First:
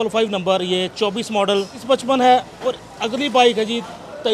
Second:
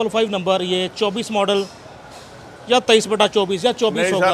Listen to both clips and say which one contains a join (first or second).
first